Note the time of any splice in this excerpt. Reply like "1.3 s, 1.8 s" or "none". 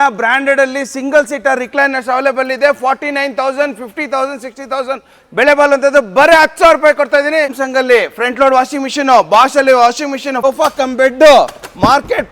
7.6 s, 10.3 s